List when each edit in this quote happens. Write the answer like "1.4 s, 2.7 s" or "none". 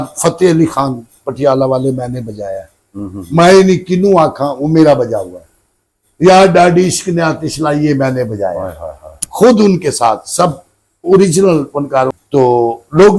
12.2 s